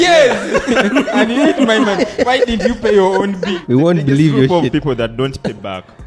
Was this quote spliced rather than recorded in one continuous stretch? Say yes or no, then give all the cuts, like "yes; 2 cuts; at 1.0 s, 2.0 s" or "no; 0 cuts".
yes; 1 cut; at 3.6 s